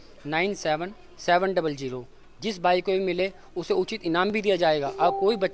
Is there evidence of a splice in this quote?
no; 0 cuts

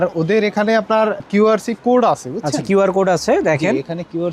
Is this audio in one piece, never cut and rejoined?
yes; 0 cuts

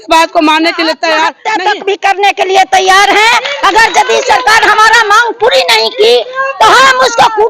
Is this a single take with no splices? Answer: no; 1 cut; at 1.4 s

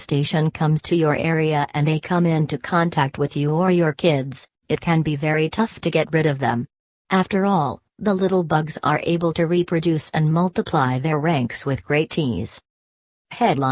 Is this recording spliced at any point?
no; 0 cuts

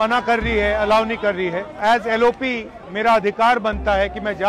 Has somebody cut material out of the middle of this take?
no; 0 cuts

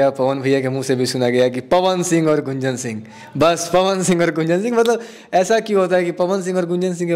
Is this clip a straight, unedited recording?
yes; 0 cuts

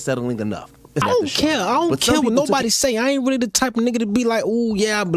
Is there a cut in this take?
yes; 1 cut; at 1.0 s

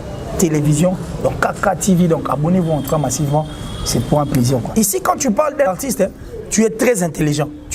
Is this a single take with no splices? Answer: no; 2 cuts; at 4.7 s, 5.7 s

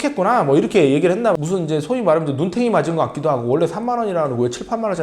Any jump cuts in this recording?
yes; 1 cut; at 1.3 s

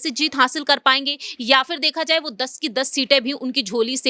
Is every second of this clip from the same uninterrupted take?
yes; 0 cuts

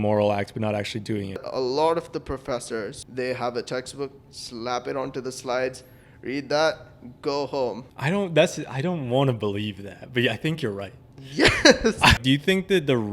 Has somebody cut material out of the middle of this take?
yes; 4 cuts; at 1.4 s, 3.0 s, 7.9 s, 12.2 s

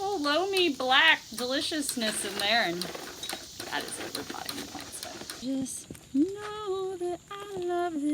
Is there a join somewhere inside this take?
yes; 1 cut; at 5.3 s

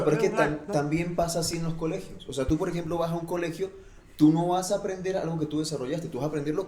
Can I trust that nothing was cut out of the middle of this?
yes; 0 cuts

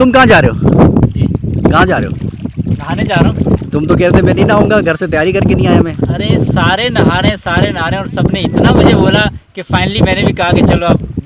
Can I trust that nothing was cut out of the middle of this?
yes; 0 cuts

